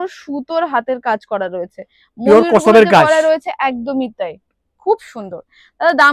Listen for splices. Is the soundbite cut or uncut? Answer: uncut